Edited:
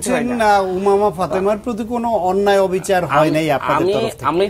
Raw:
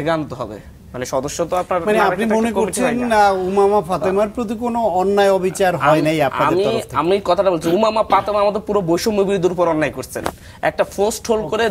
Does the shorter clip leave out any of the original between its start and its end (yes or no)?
no